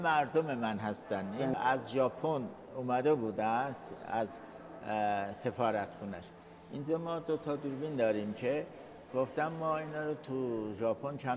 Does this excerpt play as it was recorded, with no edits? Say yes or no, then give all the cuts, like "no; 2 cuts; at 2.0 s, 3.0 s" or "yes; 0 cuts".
no; 1 cut; at 1.5 s